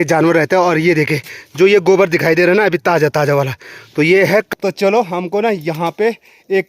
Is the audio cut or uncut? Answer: cut